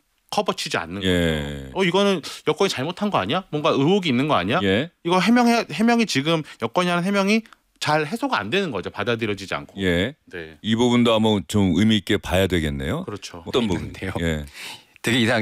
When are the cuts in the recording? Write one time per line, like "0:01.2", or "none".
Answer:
0:13.5